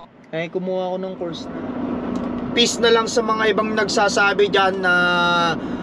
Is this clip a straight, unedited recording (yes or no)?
no